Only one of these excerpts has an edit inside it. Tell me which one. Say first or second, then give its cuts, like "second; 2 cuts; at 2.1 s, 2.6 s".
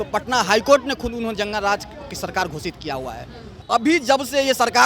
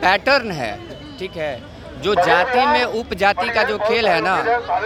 first; 1 cut; at 3.5 s